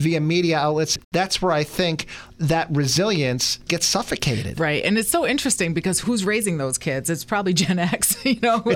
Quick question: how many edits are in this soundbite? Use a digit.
2